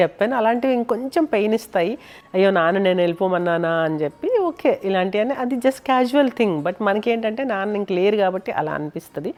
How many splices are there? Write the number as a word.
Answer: zero